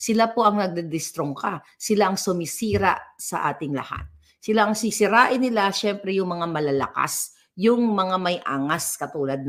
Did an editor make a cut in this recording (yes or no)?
no